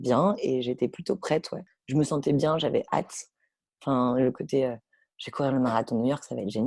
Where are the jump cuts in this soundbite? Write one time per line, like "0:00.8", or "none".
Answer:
none